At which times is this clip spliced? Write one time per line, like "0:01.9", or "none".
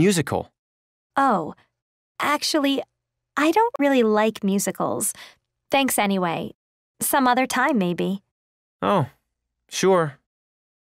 none

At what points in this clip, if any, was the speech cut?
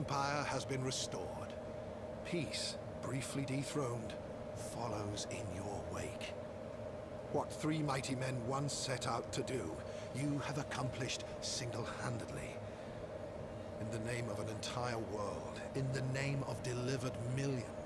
0:03.1

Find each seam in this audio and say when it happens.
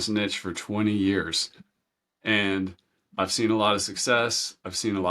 none

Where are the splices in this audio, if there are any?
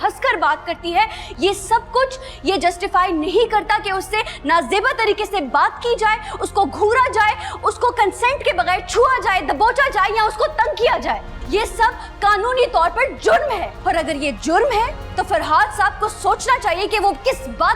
0:11.3
0:13.7
0:15.0

